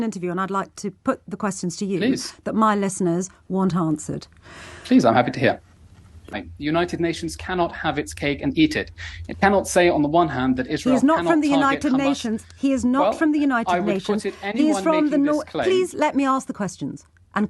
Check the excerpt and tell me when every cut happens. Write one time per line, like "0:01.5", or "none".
0:06.5